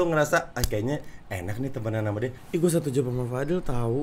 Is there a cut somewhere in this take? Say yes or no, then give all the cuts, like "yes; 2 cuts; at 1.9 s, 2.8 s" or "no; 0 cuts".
yes; 1 cut; at 2.3 s